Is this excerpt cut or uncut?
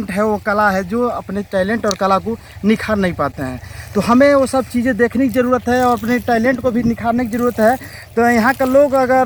uncut